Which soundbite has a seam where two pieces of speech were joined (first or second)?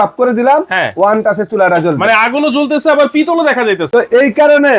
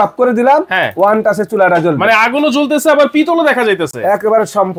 first